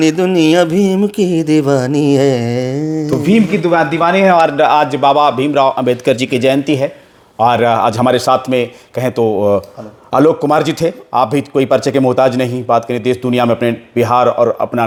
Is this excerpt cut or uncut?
uncut